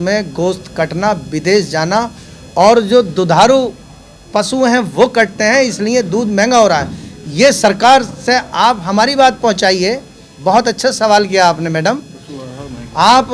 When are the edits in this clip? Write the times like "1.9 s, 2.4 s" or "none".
none